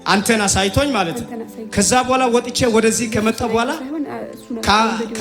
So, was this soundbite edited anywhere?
no; 0 cuts

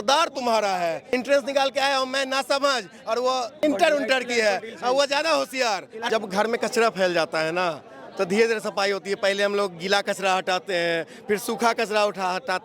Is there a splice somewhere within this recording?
yes; 3 cuts; at 1.1 s, 3.5 s, 5.9 s

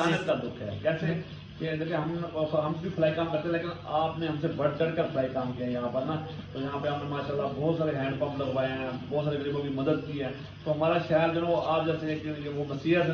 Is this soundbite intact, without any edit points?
yes; 0 cuts

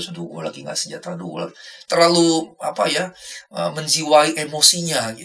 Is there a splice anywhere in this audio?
no; 0 cuts

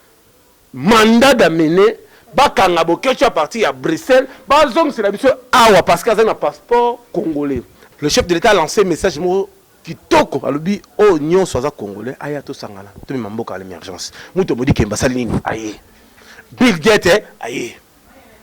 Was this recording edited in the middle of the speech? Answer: yes; 1 cut; at 7.8 s

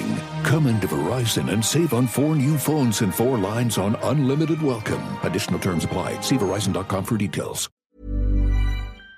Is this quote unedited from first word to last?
no; 1 cut; at 7.7 s

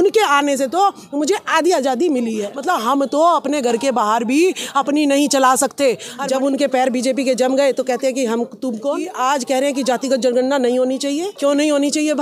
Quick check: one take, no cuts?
no; 4 cuts; at 2.5 s, 6.1 s, 9.1 s, 11.3 s

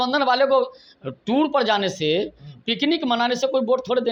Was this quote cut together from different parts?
no; 0 cuts

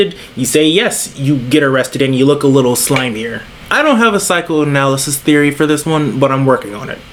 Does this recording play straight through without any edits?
yes; 0 cuts

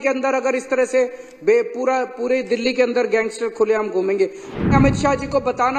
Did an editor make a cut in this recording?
yes; 1 cut; at 4.6 s

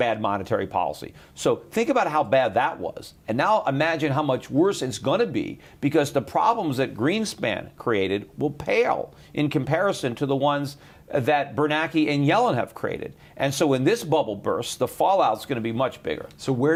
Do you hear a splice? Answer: no; 0 cuts

